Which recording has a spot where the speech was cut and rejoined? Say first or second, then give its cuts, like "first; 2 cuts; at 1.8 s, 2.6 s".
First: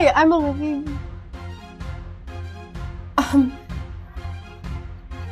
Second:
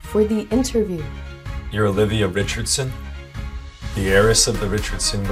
first; 2 cuts; at 1.4 s, 3.0 s